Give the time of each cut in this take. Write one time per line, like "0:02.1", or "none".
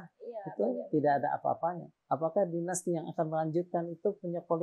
0:01.9